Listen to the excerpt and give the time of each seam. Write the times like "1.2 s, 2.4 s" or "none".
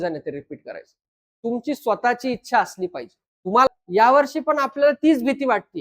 3.7 s